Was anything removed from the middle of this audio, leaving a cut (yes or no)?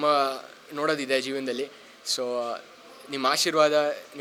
no